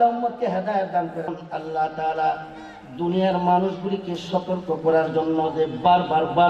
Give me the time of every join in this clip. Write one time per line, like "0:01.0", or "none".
0:01.3